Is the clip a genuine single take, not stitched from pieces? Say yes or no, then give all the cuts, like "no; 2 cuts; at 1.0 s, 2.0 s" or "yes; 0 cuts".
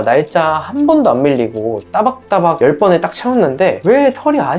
yes; 0 cuts